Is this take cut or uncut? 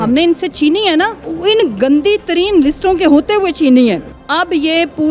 cut